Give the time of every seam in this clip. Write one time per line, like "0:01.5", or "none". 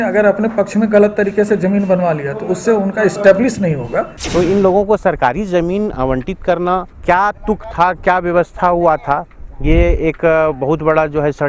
0:04.2
0:06.9